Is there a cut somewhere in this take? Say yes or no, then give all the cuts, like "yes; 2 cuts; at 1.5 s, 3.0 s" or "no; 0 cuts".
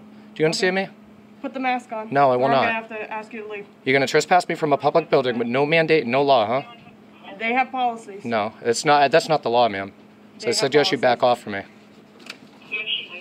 no; 0 cuts